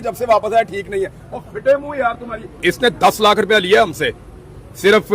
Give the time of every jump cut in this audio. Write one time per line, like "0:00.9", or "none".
0:02.6